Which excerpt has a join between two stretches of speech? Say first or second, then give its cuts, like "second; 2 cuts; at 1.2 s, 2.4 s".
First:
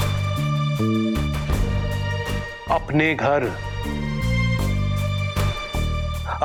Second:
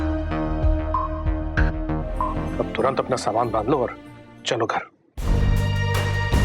second; 1 cut; at 2.4 s